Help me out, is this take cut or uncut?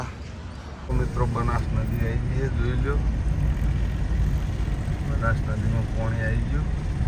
cut